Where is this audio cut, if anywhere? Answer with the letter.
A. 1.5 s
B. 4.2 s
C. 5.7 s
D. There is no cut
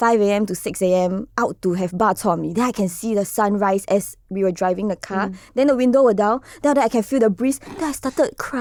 D